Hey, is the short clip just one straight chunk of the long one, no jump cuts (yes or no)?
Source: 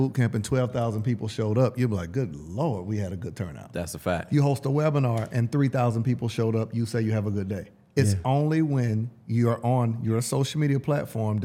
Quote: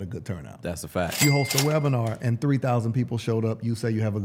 yes